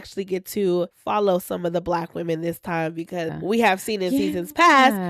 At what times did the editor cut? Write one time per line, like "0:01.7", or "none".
0:01.0
0:03.3